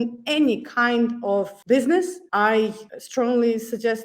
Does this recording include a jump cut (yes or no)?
yes